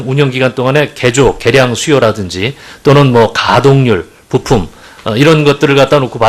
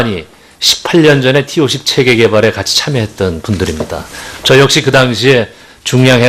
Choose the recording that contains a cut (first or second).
first